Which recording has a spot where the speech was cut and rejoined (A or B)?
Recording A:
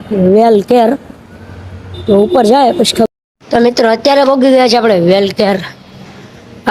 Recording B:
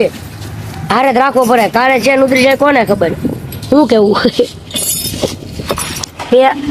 A